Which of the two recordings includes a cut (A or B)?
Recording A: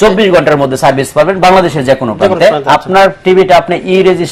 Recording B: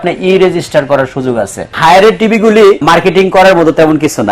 B